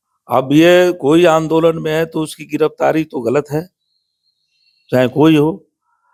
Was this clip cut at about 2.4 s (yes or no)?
no